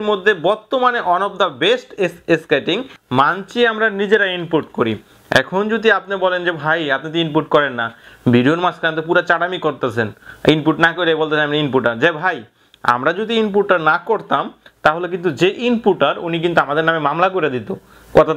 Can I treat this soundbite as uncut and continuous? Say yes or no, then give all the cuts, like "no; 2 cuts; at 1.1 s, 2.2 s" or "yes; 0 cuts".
no; 1 cut; at 2.9 s